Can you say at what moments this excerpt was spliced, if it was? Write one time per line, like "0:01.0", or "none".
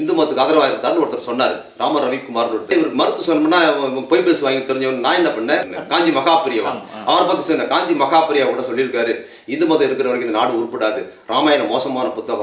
0:02.7
0:05.7